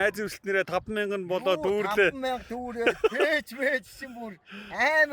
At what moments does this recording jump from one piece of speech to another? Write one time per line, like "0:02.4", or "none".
none